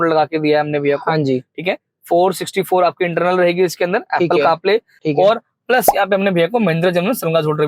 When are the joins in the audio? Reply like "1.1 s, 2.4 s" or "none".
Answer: 5.0 s